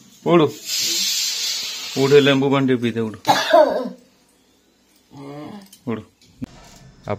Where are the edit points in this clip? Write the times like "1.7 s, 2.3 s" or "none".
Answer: 6.2 s